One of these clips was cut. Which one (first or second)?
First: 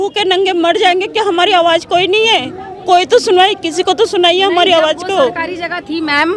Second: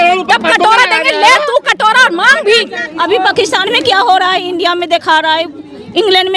second